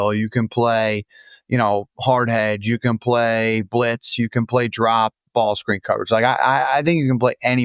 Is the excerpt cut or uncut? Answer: uncut